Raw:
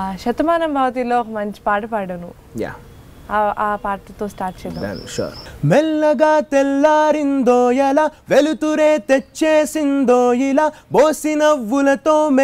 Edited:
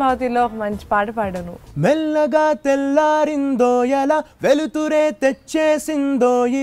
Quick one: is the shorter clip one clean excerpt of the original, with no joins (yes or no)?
no